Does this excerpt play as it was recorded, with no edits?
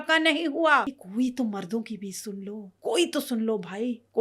no; 2 cuts; at 1.0 s, 2.7 s

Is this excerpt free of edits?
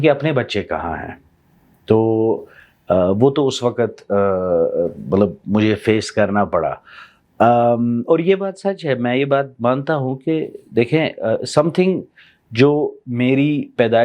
yes; 0 cuts

